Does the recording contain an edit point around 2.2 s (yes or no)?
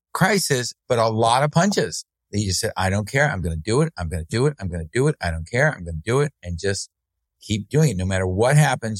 no